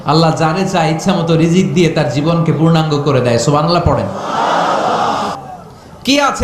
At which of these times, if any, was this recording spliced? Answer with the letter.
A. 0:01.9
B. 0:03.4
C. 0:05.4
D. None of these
C